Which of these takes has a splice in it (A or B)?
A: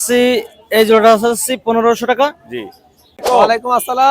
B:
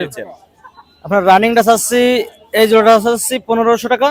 A